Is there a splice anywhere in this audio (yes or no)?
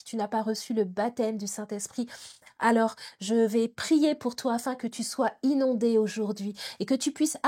no